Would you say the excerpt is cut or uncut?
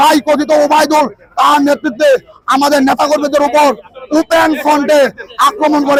uncut